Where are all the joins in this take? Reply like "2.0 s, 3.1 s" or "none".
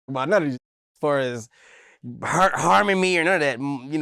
none